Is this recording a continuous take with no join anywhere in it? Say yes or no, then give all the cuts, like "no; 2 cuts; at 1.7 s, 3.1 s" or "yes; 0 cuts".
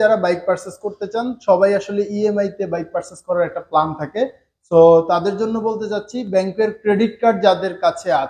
yes; 0 cuts